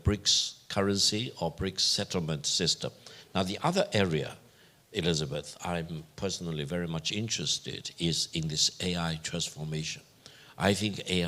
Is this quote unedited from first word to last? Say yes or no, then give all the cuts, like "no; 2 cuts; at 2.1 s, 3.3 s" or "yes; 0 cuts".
yes; 0 cuts